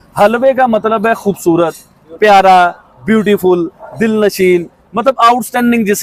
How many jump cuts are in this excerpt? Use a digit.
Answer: 0